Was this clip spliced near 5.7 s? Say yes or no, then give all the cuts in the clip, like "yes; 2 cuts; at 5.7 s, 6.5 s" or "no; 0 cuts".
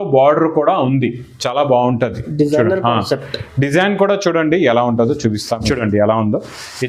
yes; 1 cut; at 5.7 s